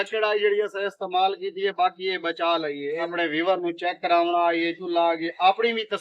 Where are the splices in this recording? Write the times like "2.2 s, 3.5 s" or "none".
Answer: 3.1 s